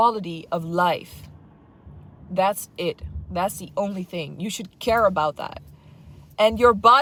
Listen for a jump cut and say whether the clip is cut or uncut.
uncut